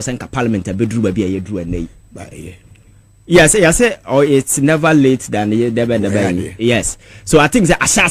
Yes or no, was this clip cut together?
no